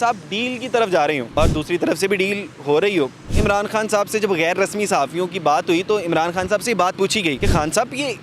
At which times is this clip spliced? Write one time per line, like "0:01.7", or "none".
0:01.3
0:03.2
0:07.4